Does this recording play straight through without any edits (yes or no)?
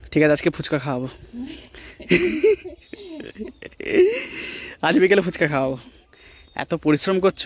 yes